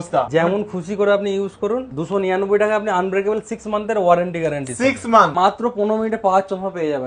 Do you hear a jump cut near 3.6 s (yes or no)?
no